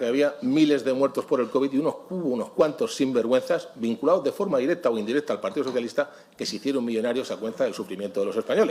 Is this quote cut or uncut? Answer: uncut